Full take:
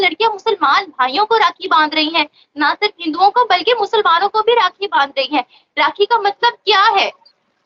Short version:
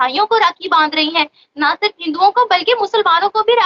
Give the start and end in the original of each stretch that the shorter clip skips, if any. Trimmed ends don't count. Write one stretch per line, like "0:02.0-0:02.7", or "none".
none